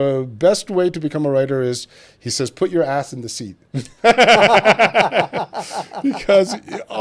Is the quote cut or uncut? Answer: uncut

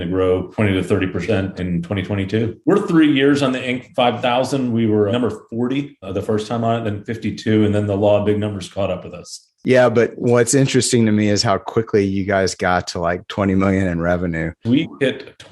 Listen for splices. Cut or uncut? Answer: cut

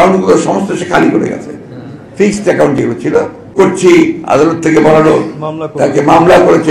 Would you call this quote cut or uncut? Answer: cut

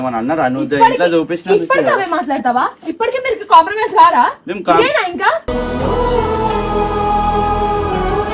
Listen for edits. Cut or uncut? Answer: uncut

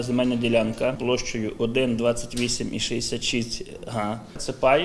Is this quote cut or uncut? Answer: cut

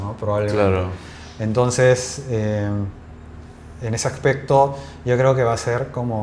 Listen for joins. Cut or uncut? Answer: uncut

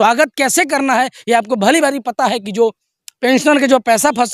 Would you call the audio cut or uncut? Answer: uncut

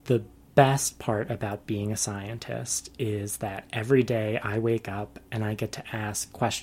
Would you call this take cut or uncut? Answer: uncut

